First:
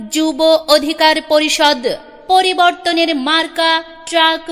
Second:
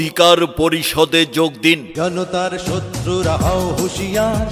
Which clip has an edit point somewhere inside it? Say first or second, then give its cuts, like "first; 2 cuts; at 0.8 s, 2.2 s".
second; 1 cut; at 1.9 s